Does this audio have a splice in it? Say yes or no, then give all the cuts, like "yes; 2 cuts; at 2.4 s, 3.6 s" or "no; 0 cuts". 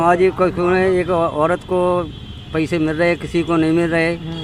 no; 0 cuts